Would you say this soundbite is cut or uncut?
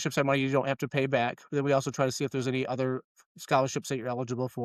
uncut